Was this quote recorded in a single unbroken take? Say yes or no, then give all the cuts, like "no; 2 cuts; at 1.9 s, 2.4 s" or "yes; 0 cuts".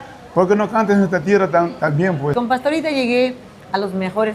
no; 1 cut; at 2.4 s